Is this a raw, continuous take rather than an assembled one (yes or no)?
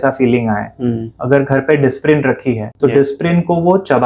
yes